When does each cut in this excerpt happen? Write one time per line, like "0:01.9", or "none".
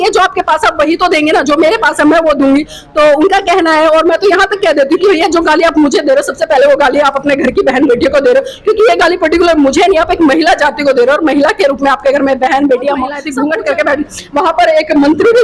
0:13.2